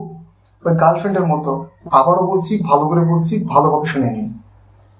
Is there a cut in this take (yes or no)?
yes